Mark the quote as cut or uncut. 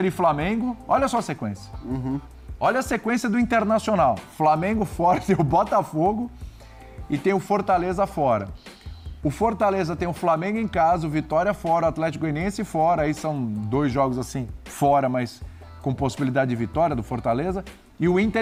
uncut